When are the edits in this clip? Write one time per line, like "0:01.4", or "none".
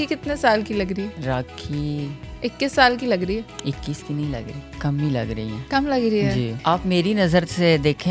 0:01.2
0:03.5
0:04.6
0:05.6
0:06.6